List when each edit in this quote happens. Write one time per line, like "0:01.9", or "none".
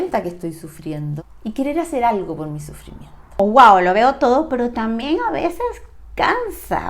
0:01.2
0:03.4